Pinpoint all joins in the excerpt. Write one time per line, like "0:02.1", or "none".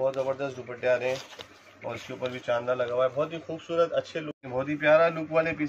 0:04.4